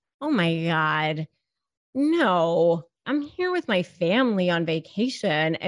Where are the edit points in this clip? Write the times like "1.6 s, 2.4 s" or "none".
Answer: 2.9 s